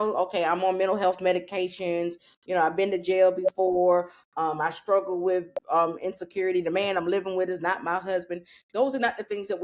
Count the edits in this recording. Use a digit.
0